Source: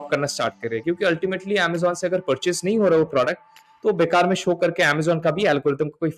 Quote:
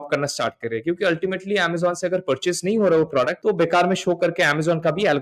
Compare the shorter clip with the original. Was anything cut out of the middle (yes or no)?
yes